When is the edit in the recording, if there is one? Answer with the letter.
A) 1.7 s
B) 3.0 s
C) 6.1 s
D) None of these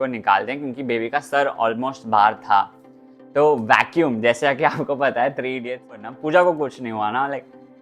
C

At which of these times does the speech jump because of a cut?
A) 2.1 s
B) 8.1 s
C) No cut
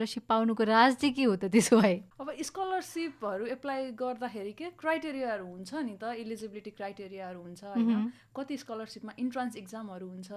C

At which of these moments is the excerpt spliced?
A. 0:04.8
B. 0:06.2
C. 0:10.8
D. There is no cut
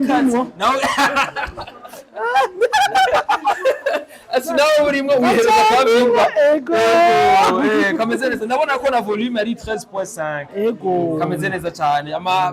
D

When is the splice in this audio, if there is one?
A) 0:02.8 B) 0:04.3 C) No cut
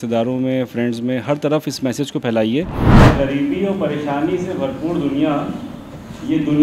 A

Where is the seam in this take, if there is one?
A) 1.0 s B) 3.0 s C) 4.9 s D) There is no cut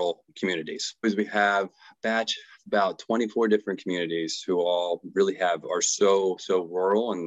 A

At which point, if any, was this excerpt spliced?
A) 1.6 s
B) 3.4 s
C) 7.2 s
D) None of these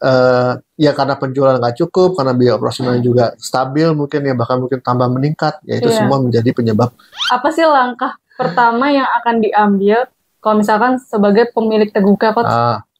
C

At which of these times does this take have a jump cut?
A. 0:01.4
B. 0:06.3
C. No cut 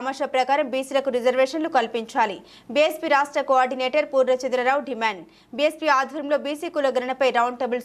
C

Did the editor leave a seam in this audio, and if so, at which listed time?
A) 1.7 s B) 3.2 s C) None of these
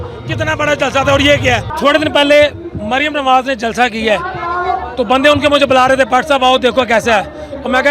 A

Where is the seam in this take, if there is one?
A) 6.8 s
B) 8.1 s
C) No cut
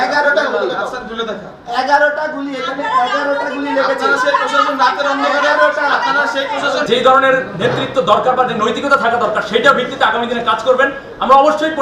A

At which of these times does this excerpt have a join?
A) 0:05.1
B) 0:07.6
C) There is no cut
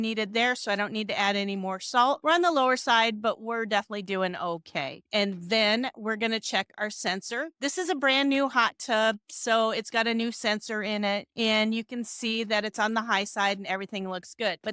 C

